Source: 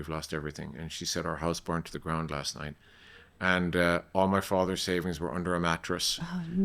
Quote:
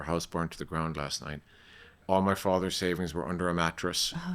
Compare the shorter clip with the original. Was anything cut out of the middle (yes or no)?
yes